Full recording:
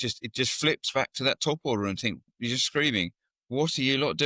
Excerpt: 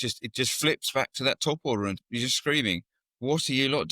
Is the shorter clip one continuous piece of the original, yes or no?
no